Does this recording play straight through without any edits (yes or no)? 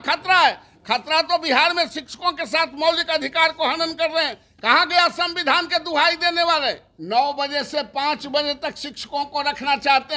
no